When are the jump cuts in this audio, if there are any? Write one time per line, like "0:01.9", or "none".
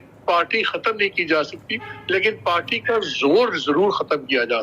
none